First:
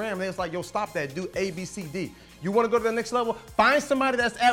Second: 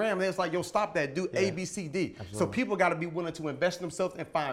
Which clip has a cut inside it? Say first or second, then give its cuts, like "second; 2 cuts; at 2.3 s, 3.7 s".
first; 1 cut; at 2.2 s